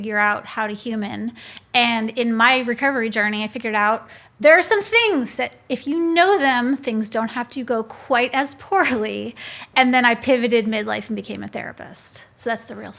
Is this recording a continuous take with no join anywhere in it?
yes; 0 cuts

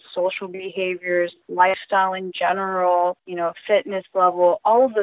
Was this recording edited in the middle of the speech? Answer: yes; 2 cuts; at 1.4 s, 3.3 s

